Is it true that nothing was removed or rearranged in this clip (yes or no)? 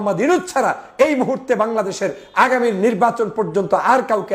yes